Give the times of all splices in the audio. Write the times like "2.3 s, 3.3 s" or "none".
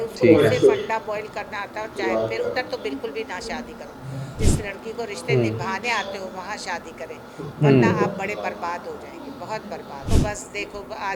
4.3 s, 10.2 s